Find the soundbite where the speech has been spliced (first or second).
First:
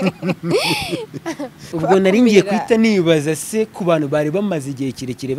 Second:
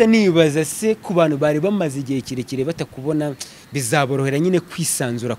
first